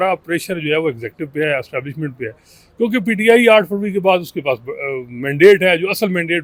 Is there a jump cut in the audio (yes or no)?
no